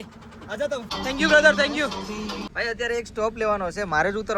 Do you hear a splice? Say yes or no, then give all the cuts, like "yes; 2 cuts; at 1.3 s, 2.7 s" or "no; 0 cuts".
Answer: no; 0 cuts